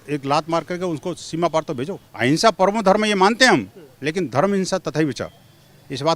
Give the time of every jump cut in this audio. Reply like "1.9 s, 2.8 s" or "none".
2.0 s